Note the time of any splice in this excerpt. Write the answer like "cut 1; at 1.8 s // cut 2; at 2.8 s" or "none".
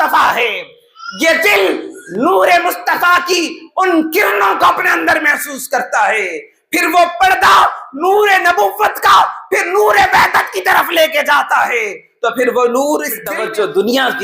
cut 1; at 13.2 s